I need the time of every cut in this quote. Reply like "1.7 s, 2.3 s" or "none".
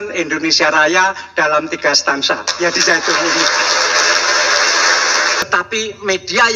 5.4 s